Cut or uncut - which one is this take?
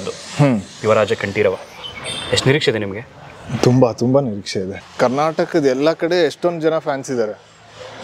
cut